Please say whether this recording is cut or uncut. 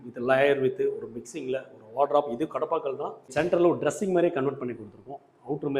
cut